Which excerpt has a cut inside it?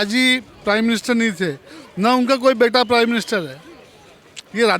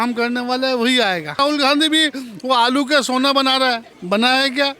second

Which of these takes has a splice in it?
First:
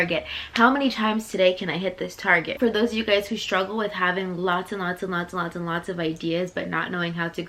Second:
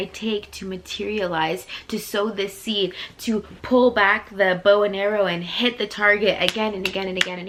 first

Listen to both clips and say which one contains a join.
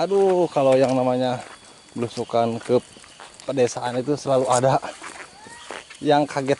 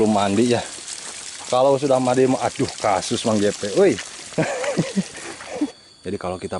second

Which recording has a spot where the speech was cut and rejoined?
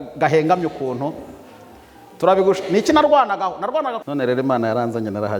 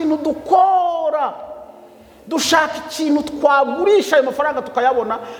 first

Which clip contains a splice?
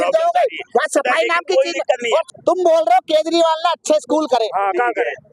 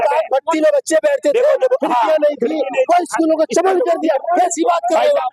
first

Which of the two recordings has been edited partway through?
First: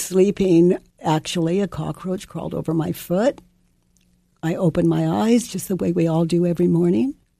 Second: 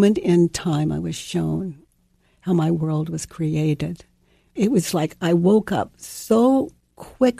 second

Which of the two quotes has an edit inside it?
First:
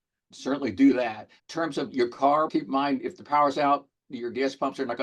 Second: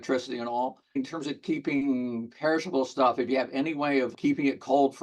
second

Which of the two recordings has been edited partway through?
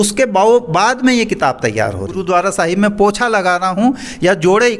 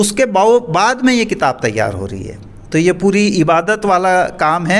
first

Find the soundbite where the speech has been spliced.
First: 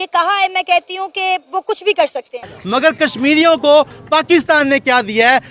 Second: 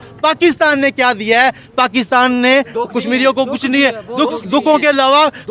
first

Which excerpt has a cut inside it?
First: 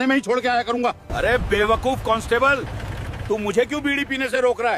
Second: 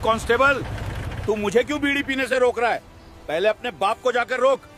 first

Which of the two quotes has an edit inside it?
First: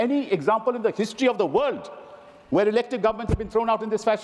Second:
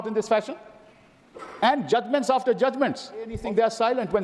second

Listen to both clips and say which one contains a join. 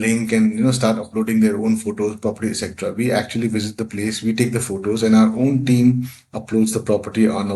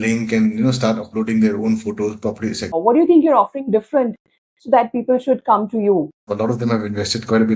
second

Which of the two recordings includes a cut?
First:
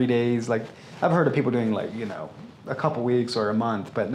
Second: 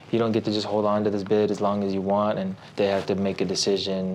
second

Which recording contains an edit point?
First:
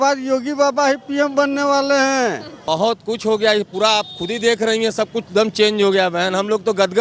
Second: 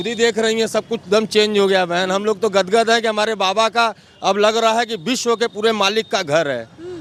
first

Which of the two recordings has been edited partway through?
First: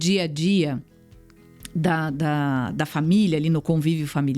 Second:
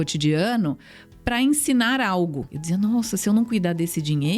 second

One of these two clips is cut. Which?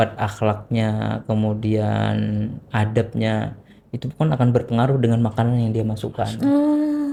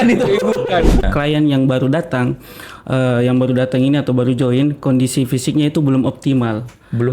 second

